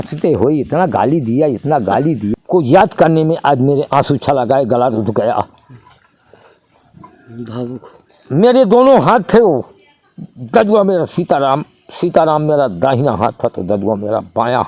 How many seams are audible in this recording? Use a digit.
1